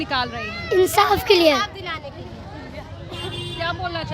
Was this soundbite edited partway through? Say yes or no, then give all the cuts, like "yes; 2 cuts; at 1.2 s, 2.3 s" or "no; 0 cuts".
no; 0 cuts